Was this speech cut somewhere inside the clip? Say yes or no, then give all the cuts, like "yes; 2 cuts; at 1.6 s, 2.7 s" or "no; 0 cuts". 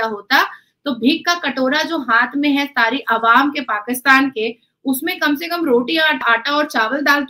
yes; 1 cut; at 6.2 s